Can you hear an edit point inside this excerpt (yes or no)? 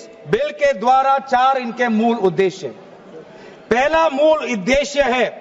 no